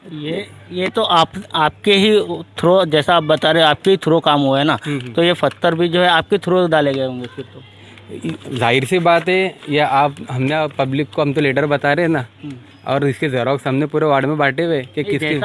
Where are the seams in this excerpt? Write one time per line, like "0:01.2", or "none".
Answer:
none